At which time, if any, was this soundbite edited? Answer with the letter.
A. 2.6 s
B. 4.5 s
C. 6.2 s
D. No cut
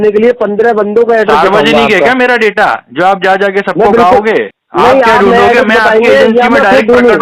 B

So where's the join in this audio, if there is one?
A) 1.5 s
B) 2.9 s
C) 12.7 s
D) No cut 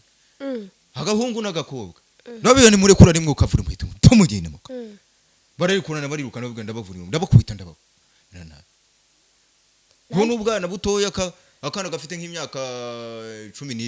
D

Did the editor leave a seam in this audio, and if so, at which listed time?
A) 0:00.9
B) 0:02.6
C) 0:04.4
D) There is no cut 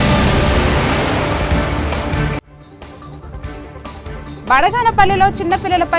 C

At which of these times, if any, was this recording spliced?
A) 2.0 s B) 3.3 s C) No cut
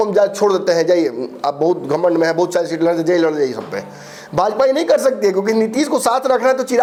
C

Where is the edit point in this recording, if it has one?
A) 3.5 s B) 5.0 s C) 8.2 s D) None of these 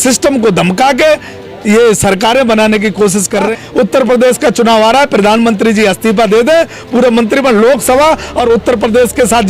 A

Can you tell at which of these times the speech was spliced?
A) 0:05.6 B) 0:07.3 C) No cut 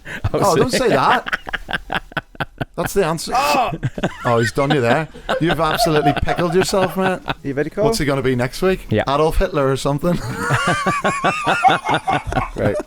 B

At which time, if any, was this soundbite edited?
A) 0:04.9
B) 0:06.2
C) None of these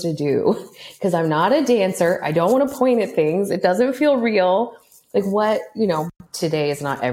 B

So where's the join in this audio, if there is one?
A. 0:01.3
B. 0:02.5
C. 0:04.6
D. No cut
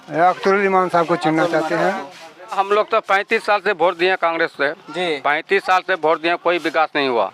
B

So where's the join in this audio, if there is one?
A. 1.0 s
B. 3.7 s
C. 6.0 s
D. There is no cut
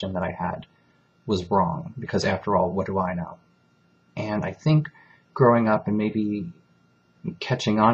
C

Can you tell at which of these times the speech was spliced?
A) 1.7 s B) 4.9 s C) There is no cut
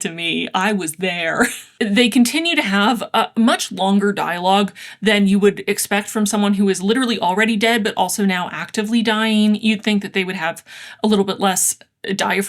A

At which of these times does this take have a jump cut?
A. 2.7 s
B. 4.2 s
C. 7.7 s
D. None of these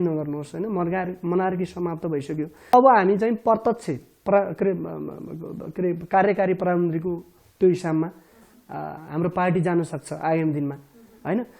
A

